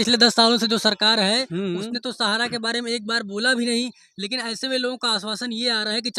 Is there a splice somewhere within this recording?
no; 0 cuts

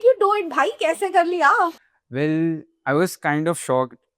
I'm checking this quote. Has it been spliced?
yes; 1 cut; at 1.9 s

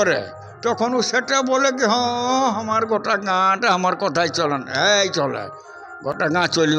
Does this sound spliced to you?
no; 0 cuts

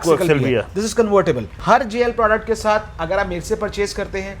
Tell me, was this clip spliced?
yes; 1 cut; at 1.5 s

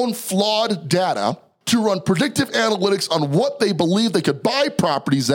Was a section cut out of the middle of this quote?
yes; 1 cut; at 1.5 s

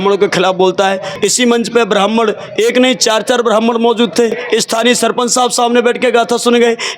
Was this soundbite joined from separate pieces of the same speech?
yes; 2 cuts; at 1.1 s, 4.4 s

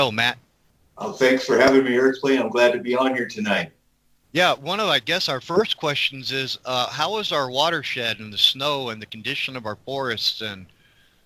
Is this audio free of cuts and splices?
no; 1 cut; at 7.8 s

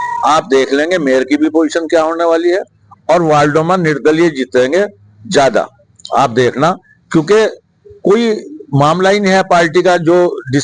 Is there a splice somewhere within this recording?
no; 0 cuts

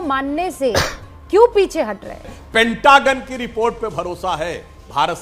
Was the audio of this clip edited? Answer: yes; 1 cut; at 2.4 s

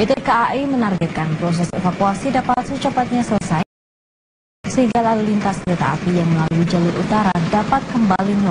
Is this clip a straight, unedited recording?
no; 1 cut; at 5.8 s

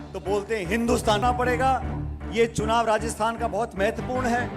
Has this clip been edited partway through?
yes; 1 cut; at 1.2 s

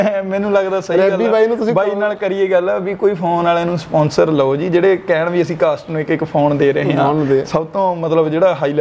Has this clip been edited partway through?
no; 0 cuts

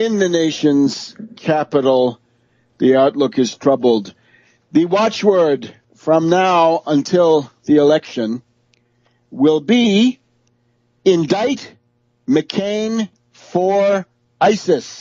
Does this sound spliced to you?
no; 0 cuts

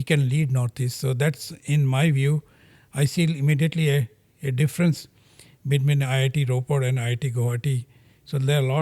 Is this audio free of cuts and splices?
yes; 0 cuts

